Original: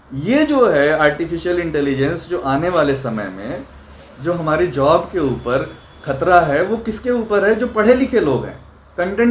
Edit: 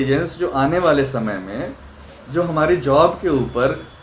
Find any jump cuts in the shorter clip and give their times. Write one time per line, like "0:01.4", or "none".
none